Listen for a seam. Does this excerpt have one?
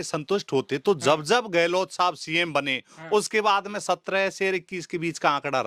no; 0 cuts

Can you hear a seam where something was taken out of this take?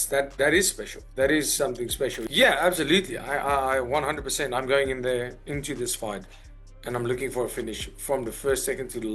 yes; 1 cut; at 2.2 s

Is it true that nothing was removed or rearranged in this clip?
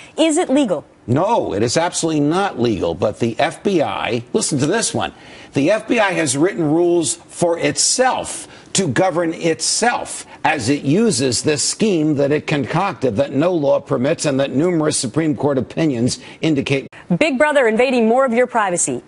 yes; 0 cuts

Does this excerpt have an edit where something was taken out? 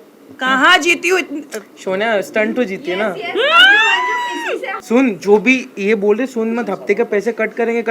yes; 1 cut; at 4.7 s

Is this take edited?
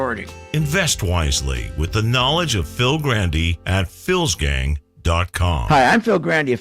yes; 1 cut; at 5.6 s

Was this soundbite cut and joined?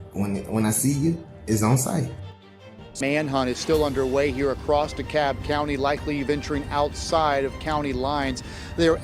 yes; 1 cut; at 2.6 s

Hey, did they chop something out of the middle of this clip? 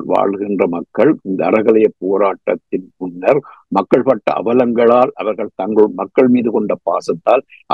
no; 0 cuts

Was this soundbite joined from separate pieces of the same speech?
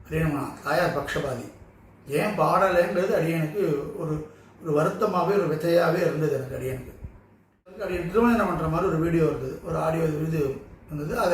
yes; 1 cut; at 7.9 s

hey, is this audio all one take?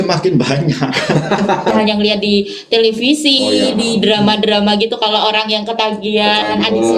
no; 1 cut; at 1.7 s

